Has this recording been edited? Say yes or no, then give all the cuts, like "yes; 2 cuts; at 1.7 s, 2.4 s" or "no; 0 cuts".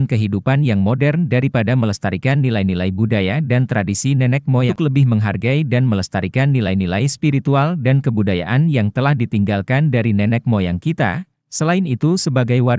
yes; 1 cut; at 4.7 s